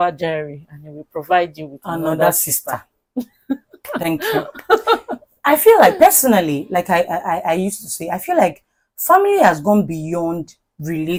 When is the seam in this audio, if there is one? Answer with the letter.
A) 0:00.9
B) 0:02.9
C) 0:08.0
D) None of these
D